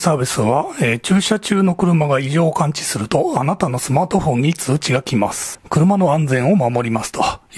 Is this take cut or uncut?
uncut